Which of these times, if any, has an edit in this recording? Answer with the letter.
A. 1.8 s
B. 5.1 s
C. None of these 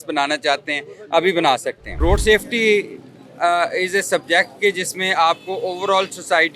A